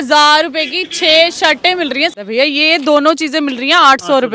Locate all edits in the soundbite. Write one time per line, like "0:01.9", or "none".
0:02.1